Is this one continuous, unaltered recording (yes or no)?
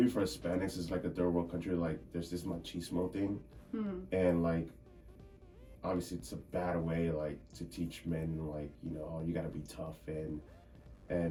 yes